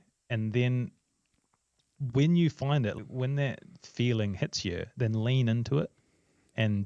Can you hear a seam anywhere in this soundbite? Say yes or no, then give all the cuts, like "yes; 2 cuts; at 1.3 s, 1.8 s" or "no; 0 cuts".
yes; 1 cut; at 3.0 s